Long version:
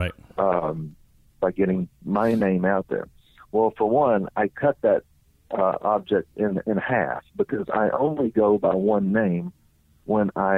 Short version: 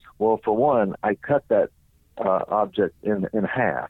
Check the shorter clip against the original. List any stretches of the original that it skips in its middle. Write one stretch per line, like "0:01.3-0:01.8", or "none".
none